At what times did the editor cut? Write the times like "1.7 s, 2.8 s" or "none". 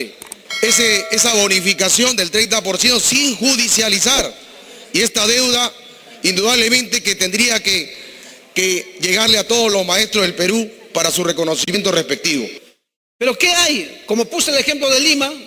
12.6 s